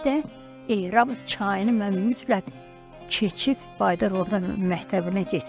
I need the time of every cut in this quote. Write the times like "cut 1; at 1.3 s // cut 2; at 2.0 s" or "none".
none